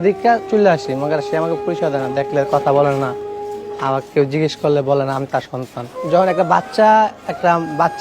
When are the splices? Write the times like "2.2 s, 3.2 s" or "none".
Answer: 5.9 s